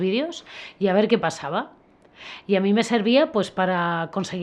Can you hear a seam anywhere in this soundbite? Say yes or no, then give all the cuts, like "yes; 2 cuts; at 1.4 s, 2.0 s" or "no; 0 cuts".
no; 0 cuts